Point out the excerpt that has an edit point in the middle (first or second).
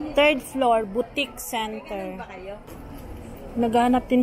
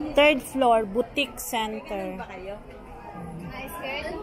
first